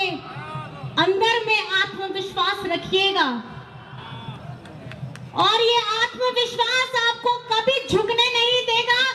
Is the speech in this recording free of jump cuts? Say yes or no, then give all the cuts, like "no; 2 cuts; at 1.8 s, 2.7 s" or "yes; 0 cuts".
yes; 0 cuts